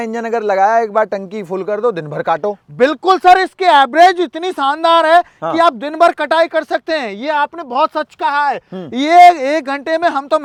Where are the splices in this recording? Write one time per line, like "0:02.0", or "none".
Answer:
none